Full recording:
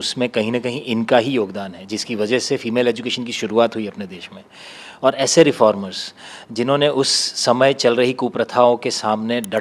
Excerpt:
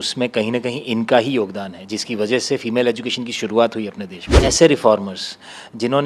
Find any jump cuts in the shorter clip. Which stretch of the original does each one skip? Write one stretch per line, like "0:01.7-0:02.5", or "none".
0:04.4-0:05.2

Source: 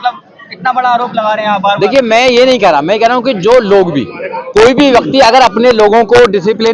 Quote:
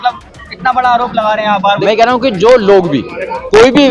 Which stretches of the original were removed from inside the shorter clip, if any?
0:01.8-0:02.9

